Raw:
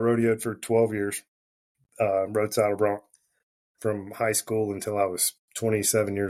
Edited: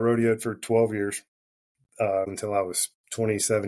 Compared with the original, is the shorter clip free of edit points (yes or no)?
no